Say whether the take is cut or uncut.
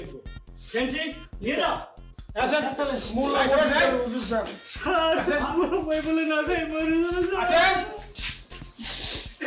uncut